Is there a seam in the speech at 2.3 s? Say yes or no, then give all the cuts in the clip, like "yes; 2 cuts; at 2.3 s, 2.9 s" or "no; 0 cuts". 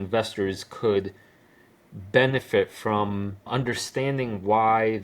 no; 1 cut; at 3.5 s